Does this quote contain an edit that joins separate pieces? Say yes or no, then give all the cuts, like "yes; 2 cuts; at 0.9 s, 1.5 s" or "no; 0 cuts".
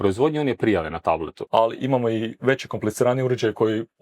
yes; 1 cut; at 1.3 s